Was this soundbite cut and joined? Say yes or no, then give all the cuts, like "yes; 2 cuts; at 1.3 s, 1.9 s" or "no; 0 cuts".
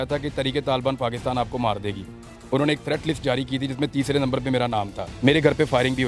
yes; 1 cut; at 5.0 s